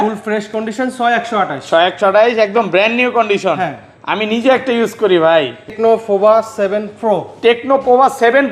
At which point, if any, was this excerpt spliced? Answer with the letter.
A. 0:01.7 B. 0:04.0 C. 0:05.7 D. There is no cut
C